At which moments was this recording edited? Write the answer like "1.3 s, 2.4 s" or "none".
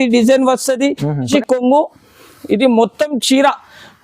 1.3 s